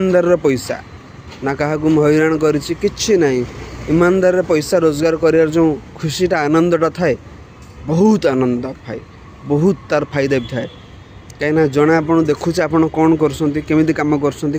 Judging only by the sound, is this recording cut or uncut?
uncut